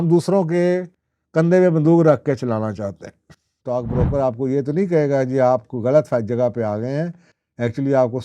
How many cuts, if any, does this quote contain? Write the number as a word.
one